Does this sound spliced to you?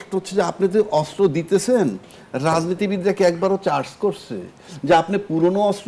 no; 0 cuts

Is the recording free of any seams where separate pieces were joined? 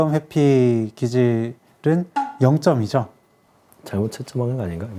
yes; 0 cuts

